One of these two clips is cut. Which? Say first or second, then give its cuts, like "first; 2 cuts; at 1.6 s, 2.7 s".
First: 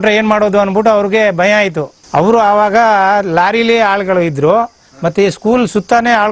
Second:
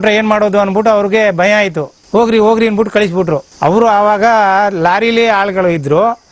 first; 1 cut; at 2.0 s